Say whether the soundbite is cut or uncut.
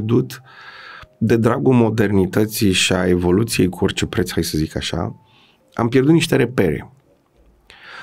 uncut